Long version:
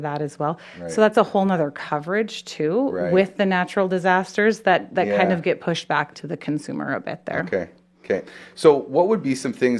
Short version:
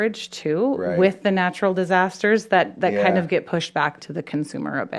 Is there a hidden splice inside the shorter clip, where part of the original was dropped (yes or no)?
no